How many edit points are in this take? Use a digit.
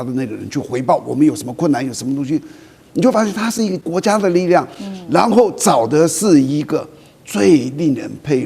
1